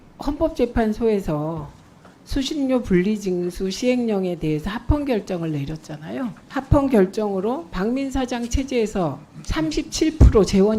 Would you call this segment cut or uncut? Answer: cut